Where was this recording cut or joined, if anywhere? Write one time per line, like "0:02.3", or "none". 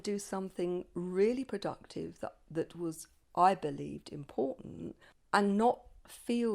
0:05.1